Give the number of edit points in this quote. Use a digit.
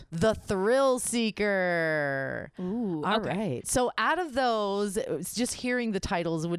0